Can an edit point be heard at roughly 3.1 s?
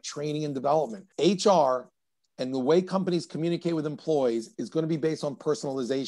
no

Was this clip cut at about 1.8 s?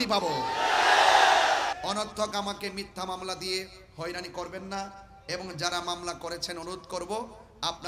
yes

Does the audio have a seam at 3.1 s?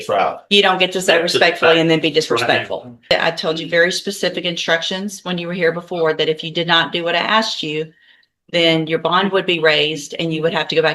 yes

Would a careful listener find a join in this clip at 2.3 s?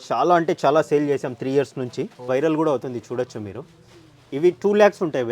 yes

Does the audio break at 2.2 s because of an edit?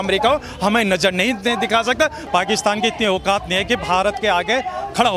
yes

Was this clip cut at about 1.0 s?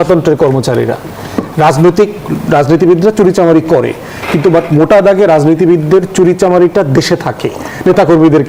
no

